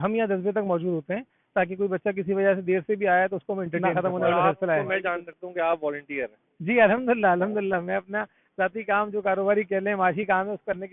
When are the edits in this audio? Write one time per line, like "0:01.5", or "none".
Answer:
0:03.9
0:05.2